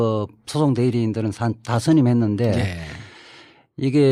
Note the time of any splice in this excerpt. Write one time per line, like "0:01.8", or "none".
none